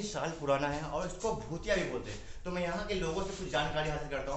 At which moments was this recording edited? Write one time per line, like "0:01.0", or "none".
none